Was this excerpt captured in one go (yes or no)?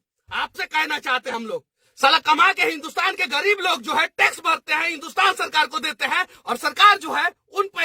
no